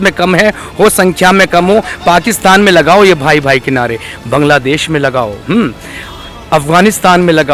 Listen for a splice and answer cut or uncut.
uncut